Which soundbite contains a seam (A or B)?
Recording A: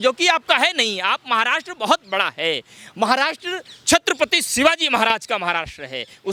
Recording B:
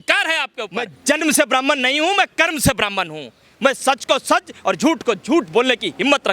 B